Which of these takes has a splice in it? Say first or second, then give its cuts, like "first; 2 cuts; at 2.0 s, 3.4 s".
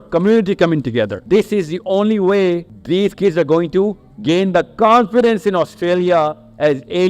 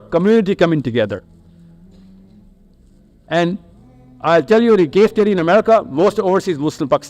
first; 2 cuts; at 1.2 s, 2.7 s